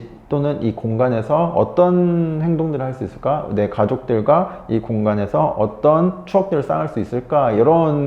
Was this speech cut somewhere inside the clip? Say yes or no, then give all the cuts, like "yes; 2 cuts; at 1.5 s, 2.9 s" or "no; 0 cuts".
no; 0 cuts